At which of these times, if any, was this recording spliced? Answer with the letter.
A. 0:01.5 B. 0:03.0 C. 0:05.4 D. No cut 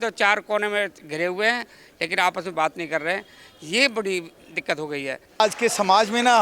C